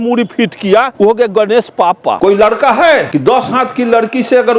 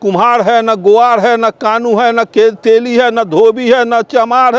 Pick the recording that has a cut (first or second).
first